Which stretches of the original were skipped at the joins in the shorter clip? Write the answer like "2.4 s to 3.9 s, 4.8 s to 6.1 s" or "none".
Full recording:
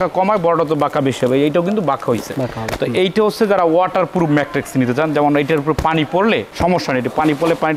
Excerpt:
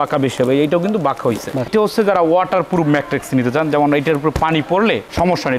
2.5 s to 3.1 s